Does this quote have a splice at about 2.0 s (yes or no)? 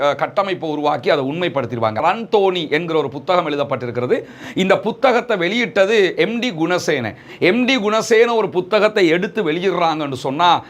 yes